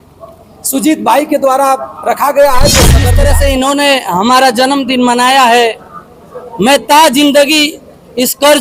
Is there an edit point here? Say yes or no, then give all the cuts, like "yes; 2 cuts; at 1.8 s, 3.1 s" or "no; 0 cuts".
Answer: yes; 1 cut; at 3.2 s